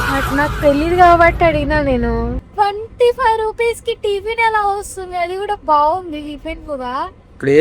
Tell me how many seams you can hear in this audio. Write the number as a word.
one